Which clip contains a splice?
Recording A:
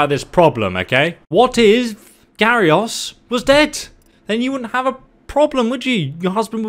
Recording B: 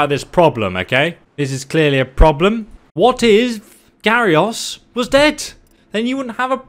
A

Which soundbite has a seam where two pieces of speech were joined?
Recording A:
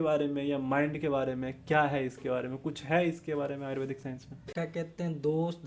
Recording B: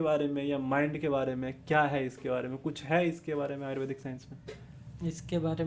A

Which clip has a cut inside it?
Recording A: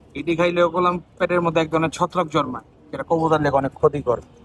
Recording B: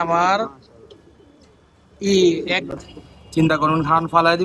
B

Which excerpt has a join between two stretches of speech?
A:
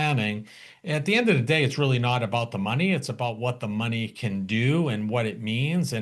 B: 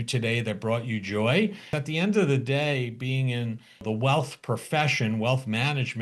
B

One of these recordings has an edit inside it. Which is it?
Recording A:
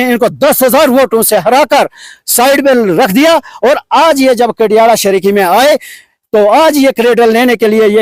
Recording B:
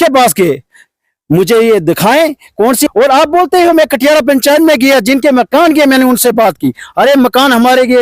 B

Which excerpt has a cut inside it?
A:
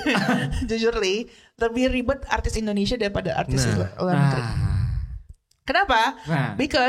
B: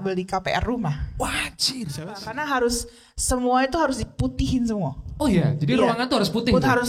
B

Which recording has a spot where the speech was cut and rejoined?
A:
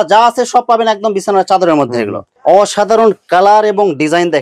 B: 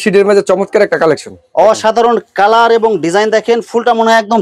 A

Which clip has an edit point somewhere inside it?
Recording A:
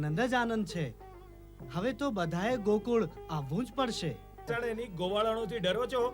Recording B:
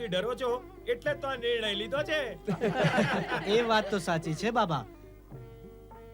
A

